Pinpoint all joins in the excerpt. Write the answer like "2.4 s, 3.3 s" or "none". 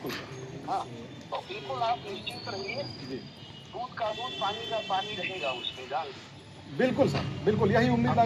none